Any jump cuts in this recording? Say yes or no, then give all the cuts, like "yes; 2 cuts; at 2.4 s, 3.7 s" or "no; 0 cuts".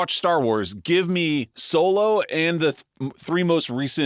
no; 0 cuts